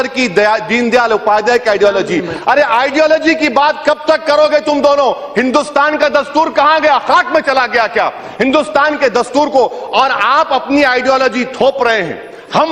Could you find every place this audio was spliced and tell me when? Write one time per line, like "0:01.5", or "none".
0:06.3